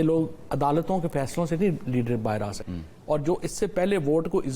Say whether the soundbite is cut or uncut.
cut